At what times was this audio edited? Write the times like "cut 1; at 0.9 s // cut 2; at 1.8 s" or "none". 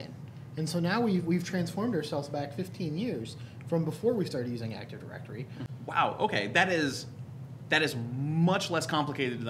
cut 1; at 5.6 s